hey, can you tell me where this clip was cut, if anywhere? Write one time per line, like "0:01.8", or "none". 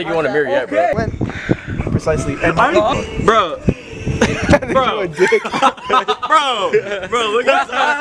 none